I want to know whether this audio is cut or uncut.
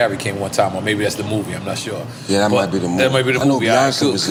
uncut